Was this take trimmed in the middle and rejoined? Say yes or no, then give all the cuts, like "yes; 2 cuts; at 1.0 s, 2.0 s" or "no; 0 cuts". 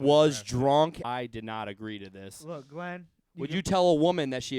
yes; 1 cut; at 1.0 s